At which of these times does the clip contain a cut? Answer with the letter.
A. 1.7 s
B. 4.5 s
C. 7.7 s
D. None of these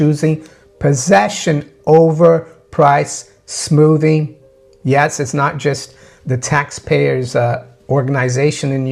C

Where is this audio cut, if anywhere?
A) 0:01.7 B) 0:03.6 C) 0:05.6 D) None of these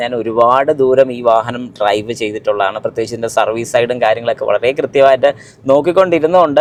D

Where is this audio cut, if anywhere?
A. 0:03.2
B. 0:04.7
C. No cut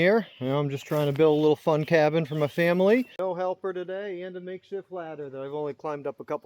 A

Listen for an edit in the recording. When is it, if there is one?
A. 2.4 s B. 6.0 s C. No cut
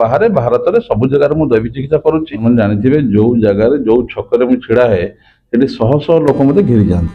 A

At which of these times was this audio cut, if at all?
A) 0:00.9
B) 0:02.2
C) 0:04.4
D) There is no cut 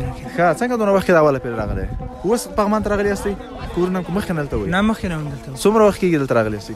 D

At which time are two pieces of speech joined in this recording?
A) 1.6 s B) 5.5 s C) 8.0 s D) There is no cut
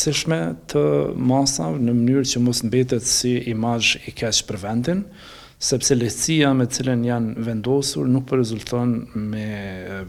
D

